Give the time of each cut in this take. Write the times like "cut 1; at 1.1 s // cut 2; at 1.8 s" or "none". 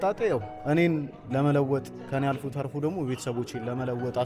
none